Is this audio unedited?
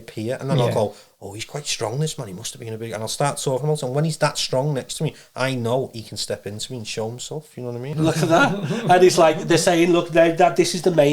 no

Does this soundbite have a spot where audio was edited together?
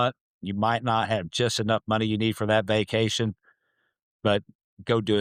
no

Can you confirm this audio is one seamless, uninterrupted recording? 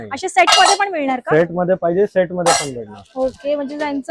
yes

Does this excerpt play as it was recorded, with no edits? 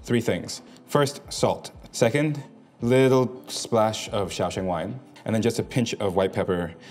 no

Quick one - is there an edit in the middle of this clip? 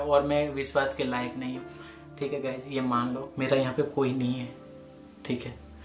yes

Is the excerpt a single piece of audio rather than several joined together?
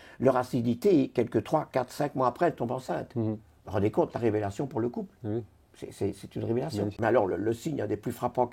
no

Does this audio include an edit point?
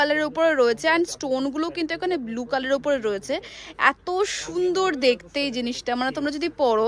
no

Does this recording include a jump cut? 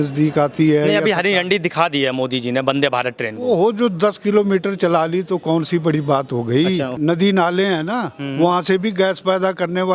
yes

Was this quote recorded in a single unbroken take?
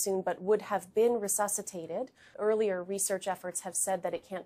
no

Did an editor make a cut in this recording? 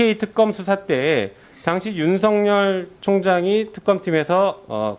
no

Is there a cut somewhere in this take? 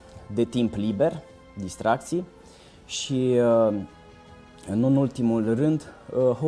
no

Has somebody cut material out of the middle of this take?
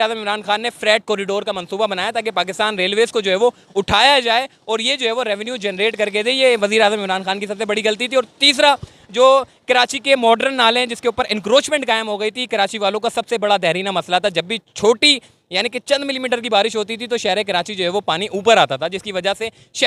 no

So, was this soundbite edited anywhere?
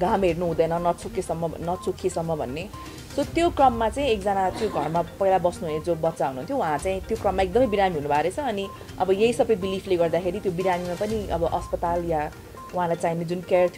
no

